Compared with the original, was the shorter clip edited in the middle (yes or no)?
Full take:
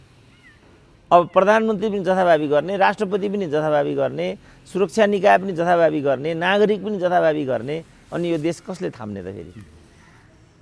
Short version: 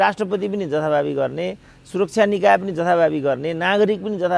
no